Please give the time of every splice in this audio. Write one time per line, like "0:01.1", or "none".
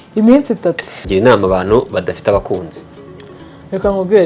0:00.9